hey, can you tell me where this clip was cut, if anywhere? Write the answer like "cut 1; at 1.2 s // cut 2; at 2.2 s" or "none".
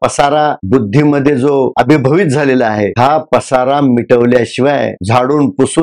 none